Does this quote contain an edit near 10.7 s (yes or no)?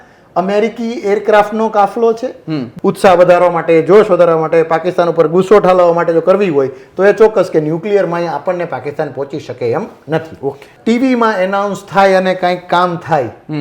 yes